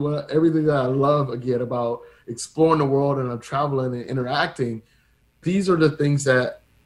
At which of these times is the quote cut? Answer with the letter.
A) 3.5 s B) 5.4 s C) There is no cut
B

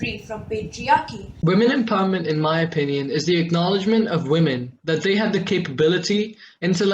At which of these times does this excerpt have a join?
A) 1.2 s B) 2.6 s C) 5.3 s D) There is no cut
A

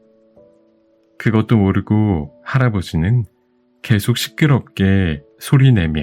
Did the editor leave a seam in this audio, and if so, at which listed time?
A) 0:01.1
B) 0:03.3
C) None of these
A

